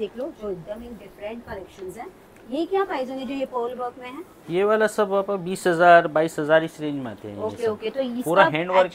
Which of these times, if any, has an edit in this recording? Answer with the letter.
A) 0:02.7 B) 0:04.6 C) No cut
C